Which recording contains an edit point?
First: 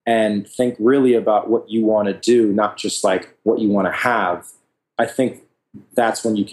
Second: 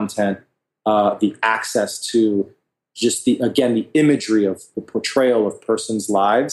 second; 1 cut; at 4.6 s

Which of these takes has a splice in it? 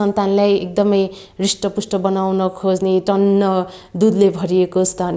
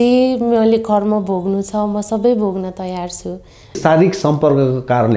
second; 1 cut; at 3.8 s

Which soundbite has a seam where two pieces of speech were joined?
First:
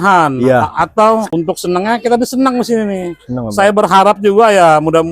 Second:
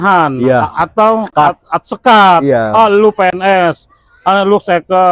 first; 1 cut; at 1.3 s

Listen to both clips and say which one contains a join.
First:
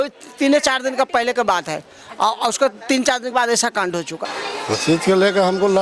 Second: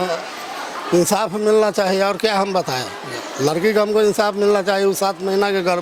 first; 1 cut; at 4.2 s

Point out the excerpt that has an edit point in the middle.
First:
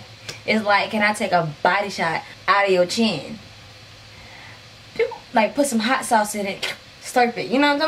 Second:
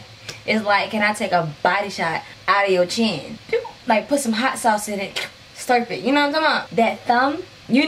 second; 2 cuts; at 3.3 s, 6.6 s

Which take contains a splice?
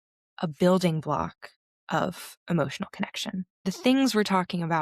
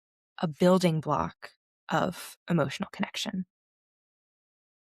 first; 1 cut; at 3.5 s

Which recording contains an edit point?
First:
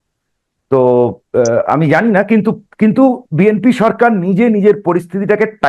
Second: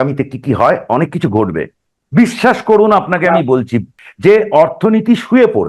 second; 2 cuts; at 1.8 s, 4.0 s

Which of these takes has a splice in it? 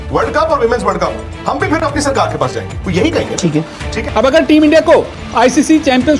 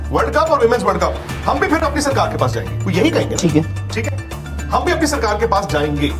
first; 1 cut; at 3.9 s

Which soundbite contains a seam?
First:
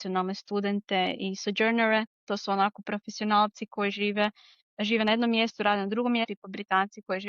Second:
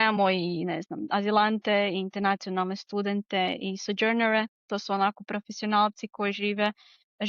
first; 1 cut; at 6.2 s

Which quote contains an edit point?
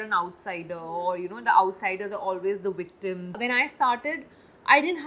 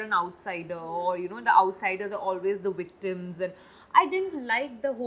first; 1 cut; at 3.4 s

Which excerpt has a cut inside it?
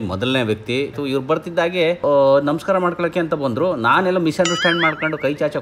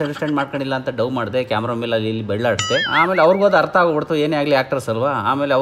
second; 1 cut; at 2.9 s

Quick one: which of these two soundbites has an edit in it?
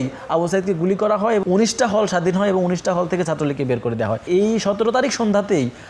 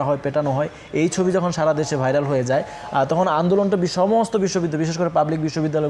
first; 2 cuts; at 1.4 s, 4.2 s

